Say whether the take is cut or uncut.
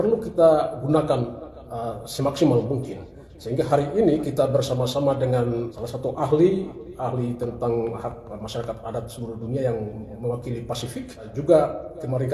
cut